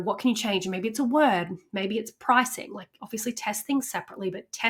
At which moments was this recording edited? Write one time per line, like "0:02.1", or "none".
none